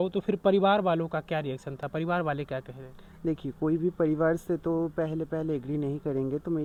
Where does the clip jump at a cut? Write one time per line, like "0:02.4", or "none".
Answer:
none